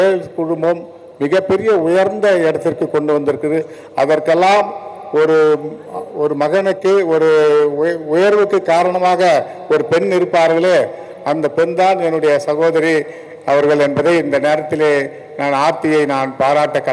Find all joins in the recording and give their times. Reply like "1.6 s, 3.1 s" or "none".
none

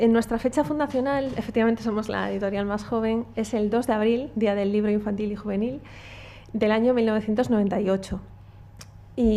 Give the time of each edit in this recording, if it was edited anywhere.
1.5 s

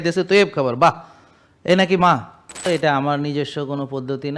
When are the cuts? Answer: 2.7 s

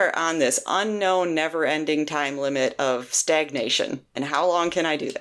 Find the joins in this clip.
4.1 s

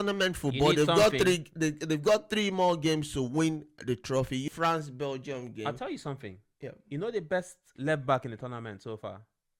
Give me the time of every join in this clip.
4.4 s

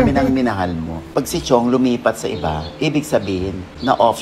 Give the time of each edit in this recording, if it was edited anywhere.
none

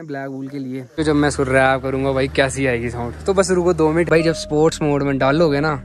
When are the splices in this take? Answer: 1.0 s, 4.1 s

